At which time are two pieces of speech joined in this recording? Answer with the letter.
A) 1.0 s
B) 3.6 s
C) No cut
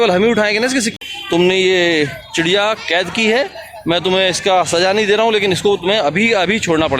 A